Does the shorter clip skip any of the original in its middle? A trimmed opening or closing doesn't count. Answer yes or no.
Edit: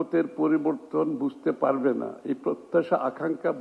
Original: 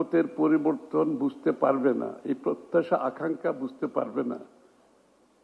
no